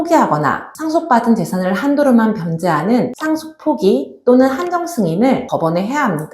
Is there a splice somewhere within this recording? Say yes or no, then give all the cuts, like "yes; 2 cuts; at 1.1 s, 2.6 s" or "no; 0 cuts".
yes; 1 cut; at 5.5 s